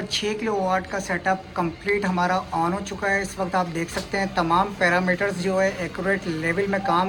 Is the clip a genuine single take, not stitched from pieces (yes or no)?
yes